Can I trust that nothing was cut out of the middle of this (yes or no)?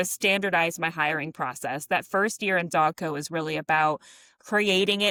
yes